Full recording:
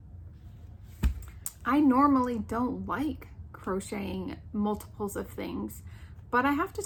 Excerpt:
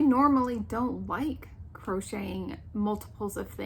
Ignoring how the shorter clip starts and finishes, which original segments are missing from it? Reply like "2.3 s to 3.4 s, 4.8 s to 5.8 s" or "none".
none